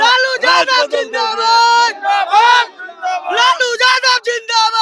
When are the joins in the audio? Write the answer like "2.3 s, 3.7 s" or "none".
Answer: none